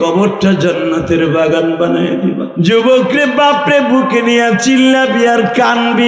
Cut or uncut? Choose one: cut